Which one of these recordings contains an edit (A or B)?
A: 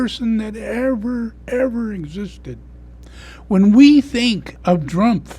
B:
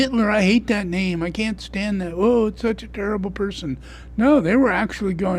A